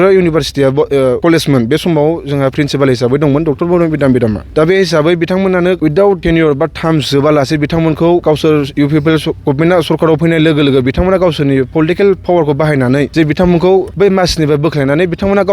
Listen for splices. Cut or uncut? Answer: cut